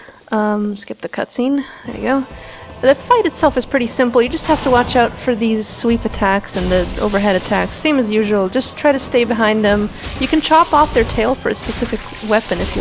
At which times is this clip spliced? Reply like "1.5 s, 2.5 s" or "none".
7.7 s